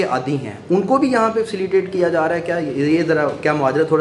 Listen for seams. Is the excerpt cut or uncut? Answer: uncut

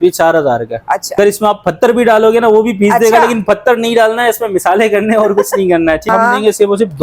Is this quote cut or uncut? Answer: cut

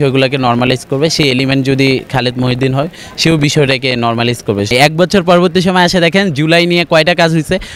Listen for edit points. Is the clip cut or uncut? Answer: cut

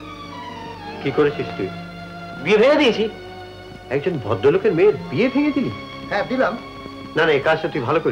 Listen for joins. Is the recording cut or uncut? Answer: uncut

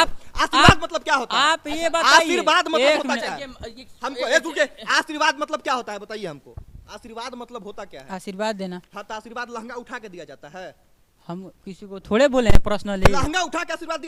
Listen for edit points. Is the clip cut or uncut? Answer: uncut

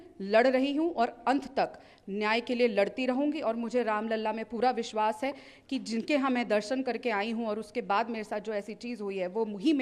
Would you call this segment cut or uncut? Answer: uncut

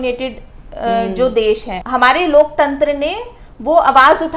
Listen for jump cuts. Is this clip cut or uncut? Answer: cut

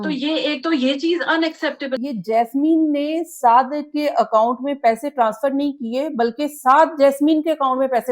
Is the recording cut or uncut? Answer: cut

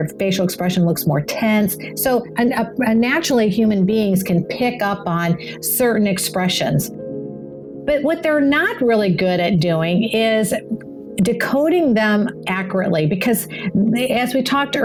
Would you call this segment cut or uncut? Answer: uncut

